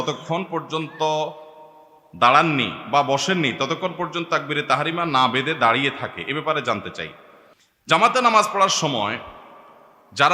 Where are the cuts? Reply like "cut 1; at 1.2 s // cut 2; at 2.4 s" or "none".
none